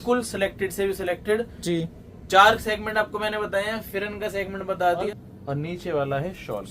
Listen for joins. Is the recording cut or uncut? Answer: cut